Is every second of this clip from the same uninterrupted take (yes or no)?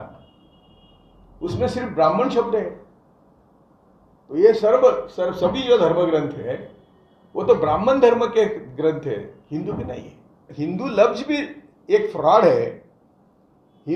no